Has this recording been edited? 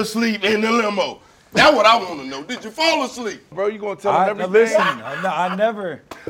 yes; 1 cut; at 3.5 s

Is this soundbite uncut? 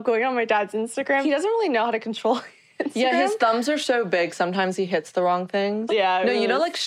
no; 2 cuts; at 1.2 s, 5.8 s

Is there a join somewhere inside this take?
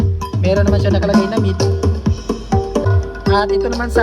yes; 1 cut; at 2.8 s

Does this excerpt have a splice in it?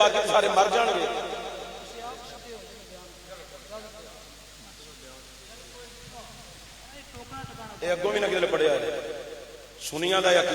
no; 0 cuts

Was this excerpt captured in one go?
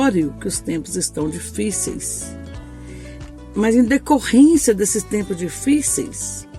no; 2 cuts; at 2.0 s, 3.5 s

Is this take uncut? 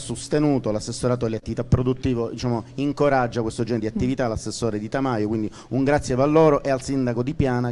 yes; 0 cuts

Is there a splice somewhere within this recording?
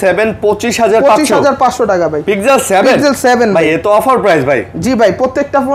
no; 0 cuts

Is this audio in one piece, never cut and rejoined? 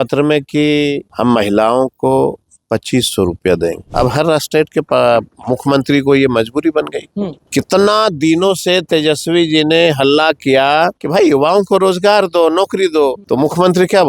no; 6 cuts; at 1.1 s, 3.8 s, 4.9 s, 7.4 s, 11.0 s, 13.2 s

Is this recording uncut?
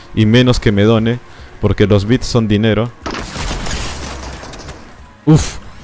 no; 1 cut; at 4.9 s

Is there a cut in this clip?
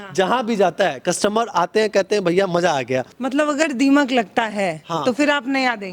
yes; 1 cut; at 3.1 s

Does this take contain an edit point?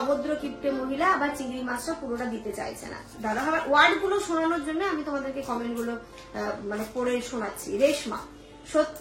yes; 1 cut; at 3.1 s

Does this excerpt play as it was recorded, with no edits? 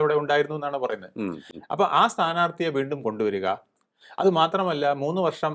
yes; 0 cuts

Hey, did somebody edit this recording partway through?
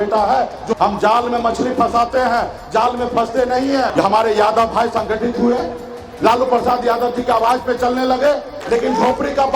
yes; 3 cuts; at 0.8 s, 3.9 s, 8.5 s

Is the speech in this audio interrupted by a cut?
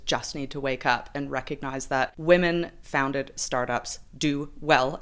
yes; 1 cut; at 2.2 s

